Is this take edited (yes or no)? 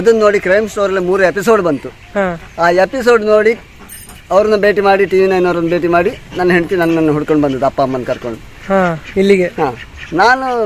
no